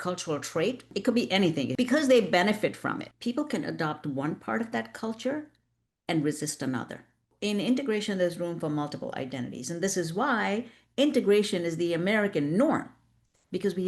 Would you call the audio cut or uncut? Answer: cut